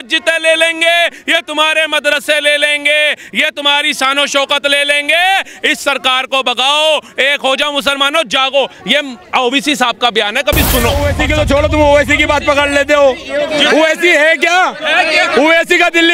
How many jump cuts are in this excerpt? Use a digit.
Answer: 1